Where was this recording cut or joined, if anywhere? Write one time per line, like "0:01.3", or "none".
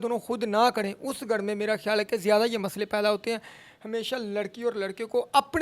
none